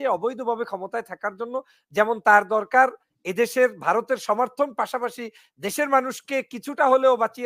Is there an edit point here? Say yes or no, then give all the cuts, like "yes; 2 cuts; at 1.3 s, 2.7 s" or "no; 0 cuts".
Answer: no; 0 cuts